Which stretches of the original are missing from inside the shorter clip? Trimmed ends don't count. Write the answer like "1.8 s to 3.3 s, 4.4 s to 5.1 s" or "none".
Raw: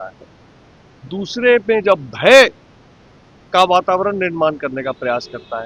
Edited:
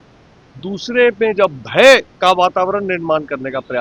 2.6 s to 3.4 s